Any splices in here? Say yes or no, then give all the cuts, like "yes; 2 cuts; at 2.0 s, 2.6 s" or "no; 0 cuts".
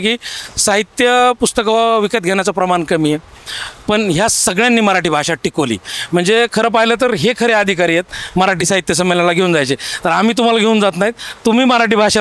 no; 0 cuts